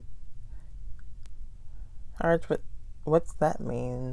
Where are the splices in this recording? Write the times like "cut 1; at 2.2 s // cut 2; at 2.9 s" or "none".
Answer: none